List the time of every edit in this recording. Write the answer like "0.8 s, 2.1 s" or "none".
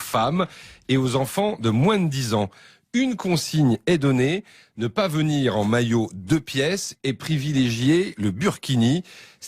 6.9 s